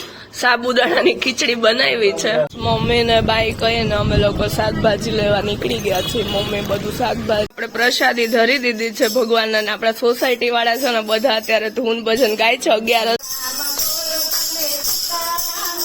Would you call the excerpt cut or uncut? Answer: cut